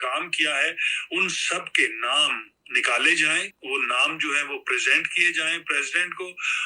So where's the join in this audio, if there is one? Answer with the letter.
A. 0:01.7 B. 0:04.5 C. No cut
C